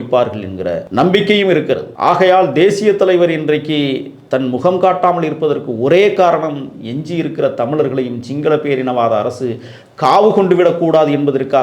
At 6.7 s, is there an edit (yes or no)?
no